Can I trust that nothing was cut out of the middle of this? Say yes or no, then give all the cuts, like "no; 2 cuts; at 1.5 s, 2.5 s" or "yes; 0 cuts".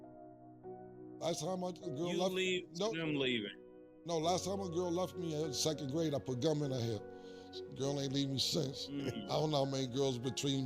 no; 1 cut; at 1.2 s